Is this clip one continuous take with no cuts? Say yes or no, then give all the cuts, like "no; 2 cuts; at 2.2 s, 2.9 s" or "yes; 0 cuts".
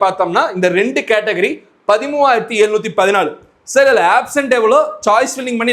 yes; 0 cuts